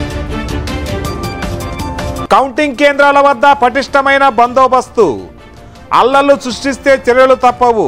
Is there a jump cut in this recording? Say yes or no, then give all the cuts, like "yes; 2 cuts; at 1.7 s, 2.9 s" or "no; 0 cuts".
yes; 1 cut; at 2.2 s